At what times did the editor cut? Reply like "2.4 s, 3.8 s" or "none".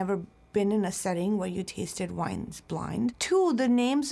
3.2 s